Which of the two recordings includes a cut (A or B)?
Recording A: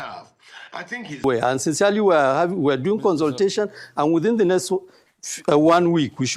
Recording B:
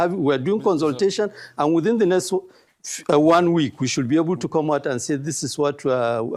A